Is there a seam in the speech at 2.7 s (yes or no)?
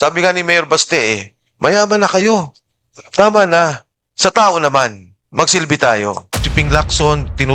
no